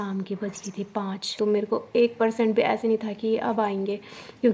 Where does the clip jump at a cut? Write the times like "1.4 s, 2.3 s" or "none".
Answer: 1.3 s